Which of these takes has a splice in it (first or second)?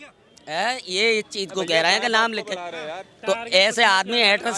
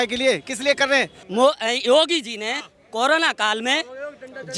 second